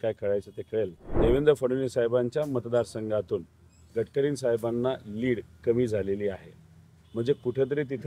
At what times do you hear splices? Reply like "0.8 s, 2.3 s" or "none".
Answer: 1.0 s